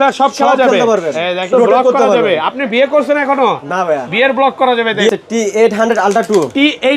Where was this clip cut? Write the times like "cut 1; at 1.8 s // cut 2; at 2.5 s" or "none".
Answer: cut 1; at 1.5 s // cut 2; at 5.1 s